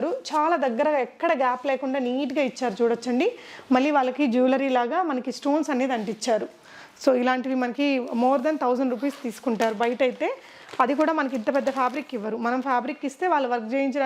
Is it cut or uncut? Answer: uncut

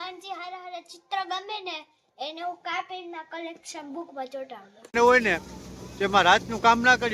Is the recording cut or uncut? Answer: cut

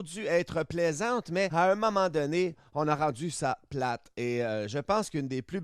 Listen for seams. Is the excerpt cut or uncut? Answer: cut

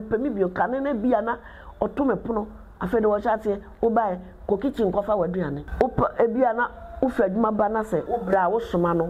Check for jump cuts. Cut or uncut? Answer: cut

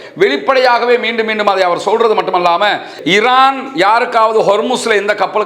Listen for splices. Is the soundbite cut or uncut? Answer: cut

